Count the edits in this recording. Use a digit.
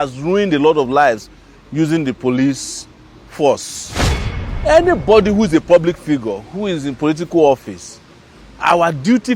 1